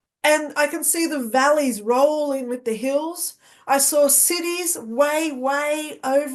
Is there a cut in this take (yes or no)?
no